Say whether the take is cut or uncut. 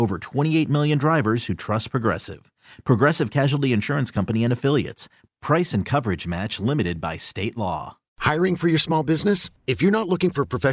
cut